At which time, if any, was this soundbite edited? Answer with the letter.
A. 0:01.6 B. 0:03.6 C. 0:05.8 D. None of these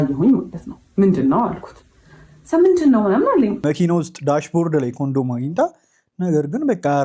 B